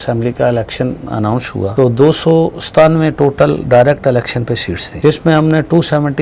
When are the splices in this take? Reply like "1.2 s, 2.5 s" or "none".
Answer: 1.7 s, 4.9 s